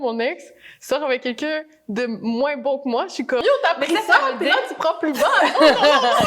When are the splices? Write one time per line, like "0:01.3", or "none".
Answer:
0:03.4